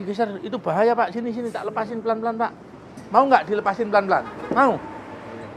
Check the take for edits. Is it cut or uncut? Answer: uncut